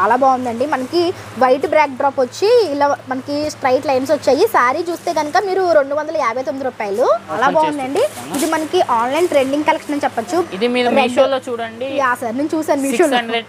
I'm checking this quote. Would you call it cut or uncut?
cut